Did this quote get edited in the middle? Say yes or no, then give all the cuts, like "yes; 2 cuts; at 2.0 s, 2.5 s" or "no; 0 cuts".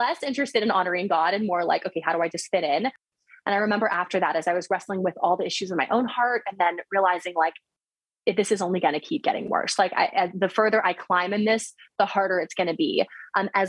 yes; 1 cut; at 3.1 s